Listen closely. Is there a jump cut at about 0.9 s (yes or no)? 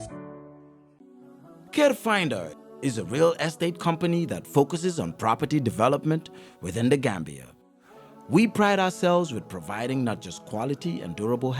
yes